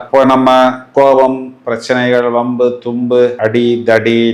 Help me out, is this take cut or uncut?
uncut